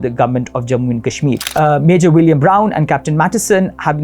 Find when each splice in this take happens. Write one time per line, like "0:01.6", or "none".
0:01.4